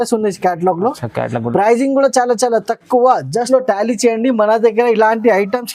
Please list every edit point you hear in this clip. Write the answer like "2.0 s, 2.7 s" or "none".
3.5 s

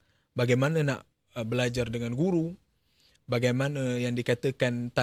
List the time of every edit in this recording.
none

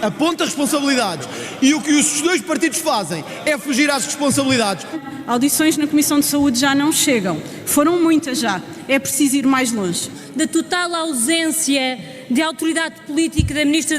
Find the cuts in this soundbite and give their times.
5.0 s, 10.2 s

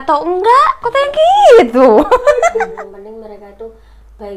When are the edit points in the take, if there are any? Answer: 2.7 s

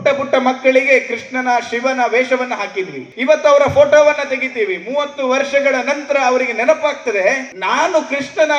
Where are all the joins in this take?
3.1 s, 7.5 s

